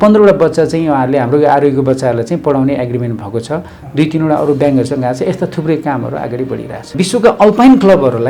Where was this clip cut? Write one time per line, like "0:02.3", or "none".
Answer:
0:06.9